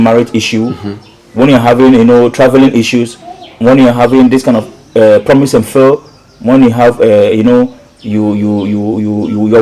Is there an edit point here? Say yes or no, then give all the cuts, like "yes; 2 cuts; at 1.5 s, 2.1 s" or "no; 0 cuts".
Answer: no; 0 cuts